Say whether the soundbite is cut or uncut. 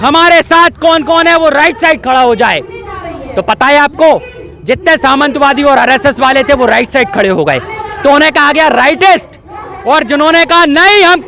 uncut